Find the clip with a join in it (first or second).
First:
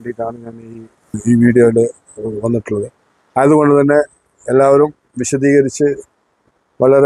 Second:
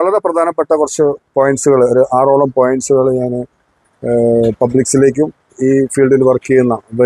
first